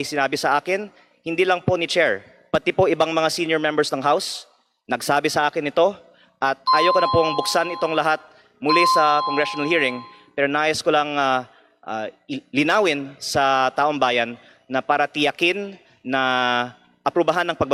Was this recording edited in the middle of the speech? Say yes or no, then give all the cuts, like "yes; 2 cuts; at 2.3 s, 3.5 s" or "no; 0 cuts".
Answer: no; 0 cuts